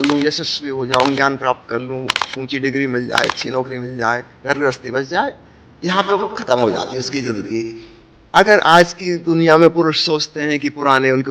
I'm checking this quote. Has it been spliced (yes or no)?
yes